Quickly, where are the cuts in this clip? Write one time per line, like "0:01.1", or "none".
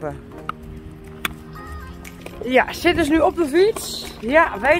0:02.2